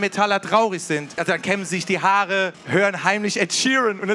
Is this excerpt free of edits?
no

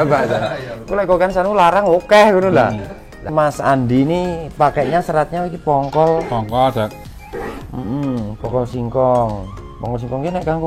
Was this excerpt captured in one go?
no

